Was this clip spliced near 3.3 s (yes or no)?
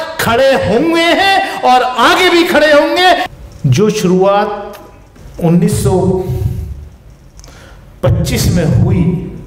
yes